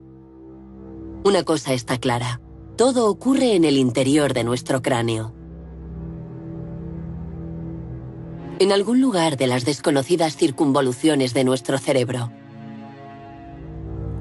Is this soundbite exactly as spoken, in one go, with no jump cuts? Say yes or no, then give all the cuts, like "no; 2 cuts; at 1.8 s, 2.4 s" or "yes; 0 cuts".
yes; 0 cuts